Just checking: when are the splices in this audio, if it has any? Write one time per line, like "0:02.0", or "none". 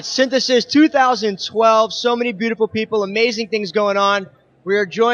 none